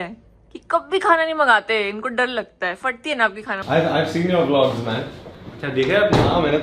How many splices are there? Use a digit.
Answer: 1